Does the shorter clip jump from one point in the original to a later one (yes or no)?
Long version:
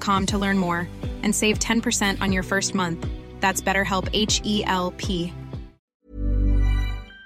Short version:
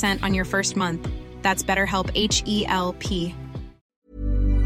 no